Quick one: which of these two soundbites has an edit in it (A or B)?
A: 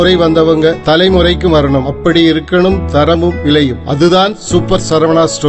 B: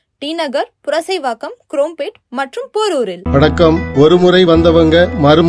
B